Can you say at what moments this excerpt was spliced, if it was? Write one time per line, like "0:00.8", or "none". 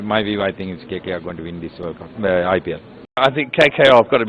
0:03.2